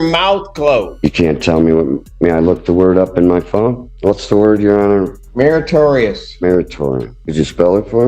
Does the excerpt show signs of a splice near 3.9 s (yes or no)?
yes